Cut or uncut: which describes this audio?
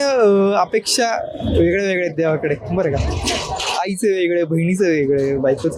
uncut